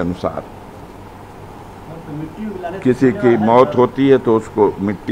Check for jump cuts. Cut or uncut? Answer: uncut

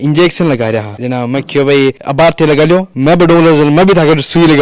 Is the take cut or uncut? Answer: uncut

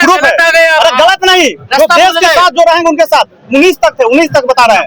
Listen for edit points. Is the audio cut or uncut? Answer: uncut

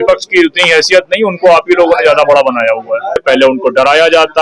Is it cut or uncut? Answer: cut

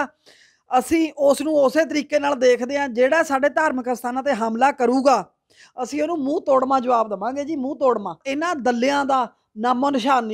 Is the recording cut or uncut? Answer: cut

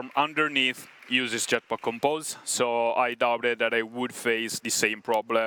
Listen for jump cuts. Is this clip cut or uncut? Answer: uncut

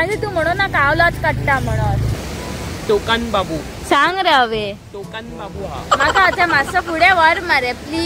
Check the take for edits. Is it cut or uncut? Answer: cut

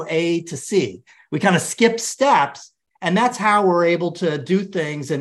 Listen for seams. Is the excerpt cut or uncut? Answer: uncut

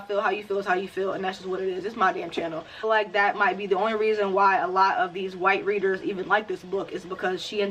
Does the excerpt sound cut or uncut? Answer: cut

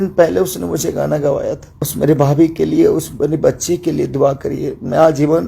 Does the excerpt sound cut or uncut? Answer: cut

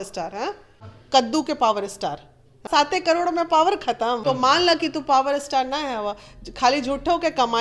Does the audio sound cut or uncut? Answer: cut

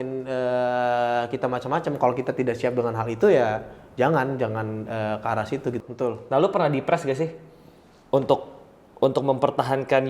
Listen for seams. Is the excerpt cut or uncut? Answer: cut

